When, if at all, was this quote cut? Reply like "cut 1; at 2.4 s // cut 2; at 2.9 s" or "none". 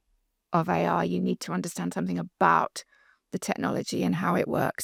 none